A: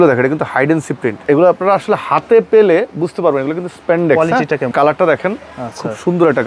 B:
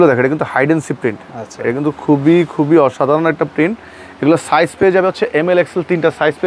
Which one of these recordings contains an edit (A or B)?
A